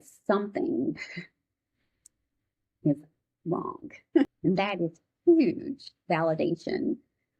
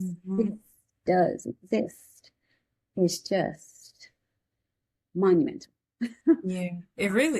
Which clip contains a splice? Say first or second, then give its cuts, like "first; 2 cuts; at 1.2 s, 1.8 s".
first; 1 cut; at 4.3 s